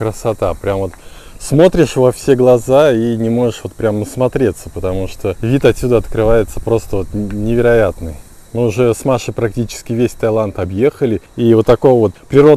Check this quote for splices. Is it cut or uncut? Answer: uncut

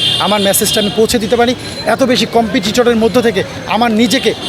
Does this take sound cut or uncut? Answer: uncut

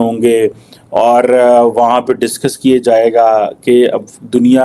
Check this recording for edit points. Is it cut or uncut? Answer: uncut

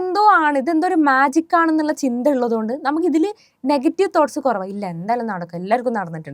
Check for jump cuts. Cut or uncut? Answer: uncut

